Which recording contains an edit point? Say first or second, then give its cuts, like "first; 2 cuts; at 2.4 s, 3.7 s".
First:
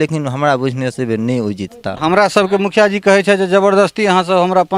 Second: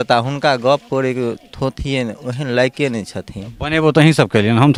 first; 1 cut; at 1.9 s